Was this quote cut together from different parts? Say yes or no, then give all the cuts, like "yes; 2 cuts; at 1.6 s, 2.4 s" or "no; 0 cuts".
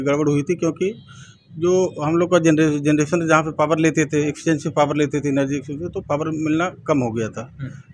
no; 0 cuts